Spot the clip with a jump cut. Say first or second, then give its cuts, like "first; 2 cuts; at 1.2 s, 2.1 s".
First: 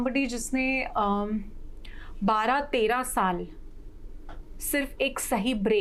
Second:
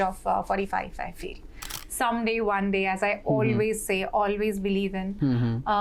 second; 1 cut; at 1.7 s